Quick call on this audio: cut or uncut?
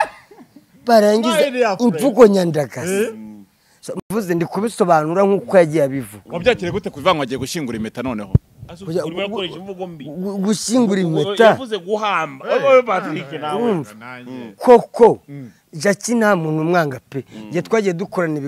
uncut